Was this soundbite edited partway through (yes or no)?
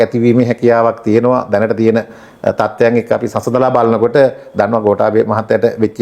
no